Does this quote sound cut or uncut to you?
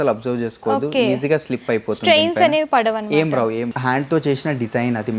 cut